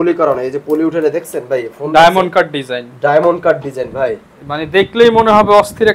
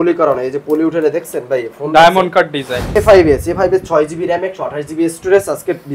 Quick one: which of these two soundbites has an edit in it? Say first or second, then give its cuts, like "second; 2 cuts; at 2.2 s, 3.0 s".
second; 1 cut; at 3.0 s